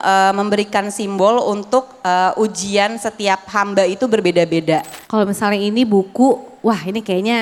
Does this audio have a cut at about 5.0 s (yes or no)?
yes